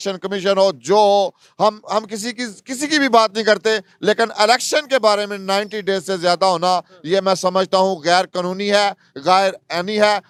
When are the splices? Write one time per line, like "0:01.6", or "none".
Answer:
none